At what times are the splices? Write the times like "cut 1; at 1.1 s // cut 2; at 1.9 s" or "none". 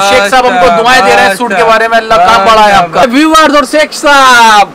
cut 1; at 3.0 s

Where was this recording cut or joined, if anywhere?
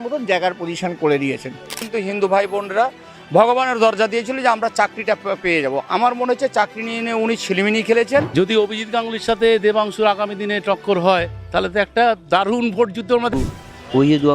cut 1; at 1.8 s // cut 2; at 8.3 s // cut 3; at 13.3 s

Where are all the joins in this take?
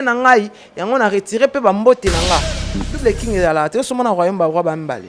cut 1; at 2.9 s

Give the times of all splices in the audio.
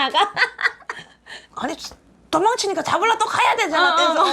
cut 1; at 1.4 s

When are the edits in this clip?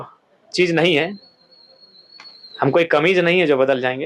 none

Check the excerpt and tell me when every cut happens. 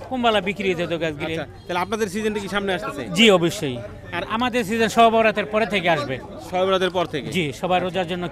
none

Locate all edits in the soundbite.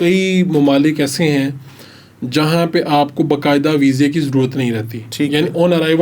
none

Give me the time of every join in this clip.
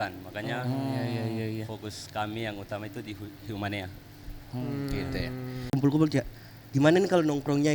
cut 1; at 5.7 s

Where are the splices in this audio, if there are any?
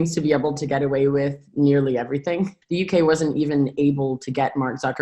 cut 1; at 2.5 s

